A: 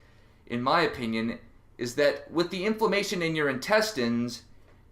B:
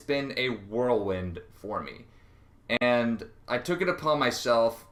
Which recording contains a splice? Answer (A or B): A